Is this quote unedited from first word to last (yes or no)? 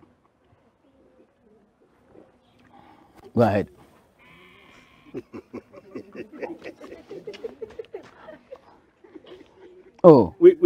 yes